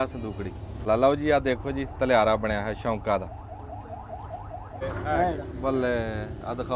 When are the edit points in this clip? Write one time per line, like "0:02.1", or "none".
0:00.9
0:04.8